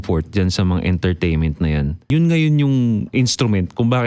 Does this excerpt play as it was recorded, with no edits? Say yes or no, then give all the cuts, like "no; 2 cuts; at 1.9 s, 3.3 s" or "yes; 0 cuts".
no; 2 cuts; at 2.1 s, 3.1 s